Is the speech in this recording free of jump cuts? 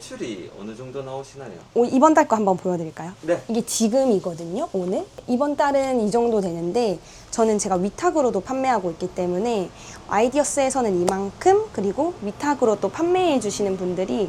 yes; 0 cuts

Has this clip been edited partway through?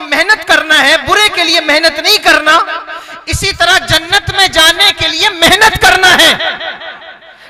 no; 0 cuts

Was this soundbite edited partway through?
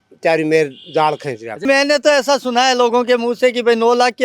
yes; 1 cut; at 1.6 s

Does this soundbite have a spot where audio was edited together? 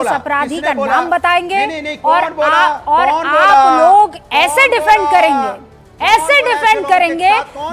no; 0 cuts

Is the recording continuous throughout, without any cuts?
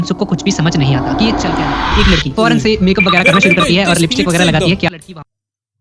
no; 2 cuts; at 1.9 s, 4.9 s

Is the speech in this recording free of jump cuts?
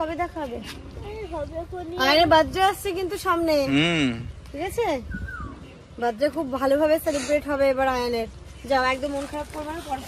yes; 0 cuts

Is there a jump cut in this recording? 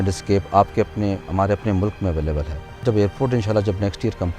yes; 1 cut; at 2.8 s

